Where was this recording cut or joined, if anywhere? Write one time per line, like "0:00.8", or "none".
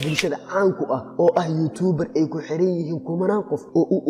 none